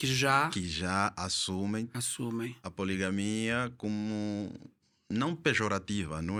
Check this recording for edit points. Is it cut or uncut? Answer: uncut